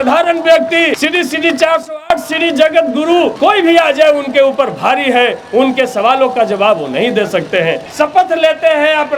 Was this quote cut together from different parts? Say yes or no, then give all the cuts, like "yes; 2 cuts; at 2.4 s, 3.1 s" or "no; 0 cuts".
yes; 3 cuts; at 1.0 s, 3.3 s, 7.8 s